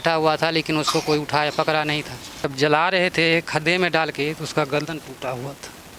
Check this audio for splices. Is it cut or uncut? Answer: cut